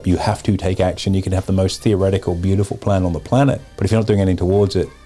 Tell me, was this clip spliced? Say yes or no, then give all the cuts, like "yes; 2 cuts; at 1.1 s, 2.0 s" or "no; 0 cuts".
yes; 1 cut; at 3.7 s